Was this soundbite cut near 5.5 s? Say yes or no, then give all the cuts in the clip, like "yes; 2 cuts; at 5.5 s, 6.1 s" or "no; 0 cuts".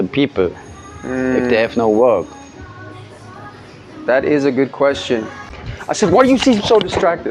yes; 1 cut; at 5.5 s